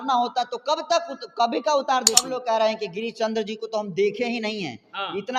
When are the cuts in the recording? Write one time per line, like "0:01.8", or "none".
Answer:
0:02.3